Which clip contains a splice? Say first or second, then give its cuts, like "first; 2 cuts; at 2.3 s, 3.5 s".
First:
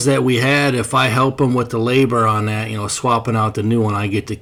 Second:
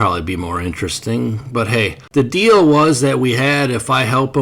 second; 1 cut; at 2.0 s